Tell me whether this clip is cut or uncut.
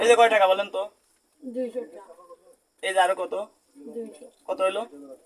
uncut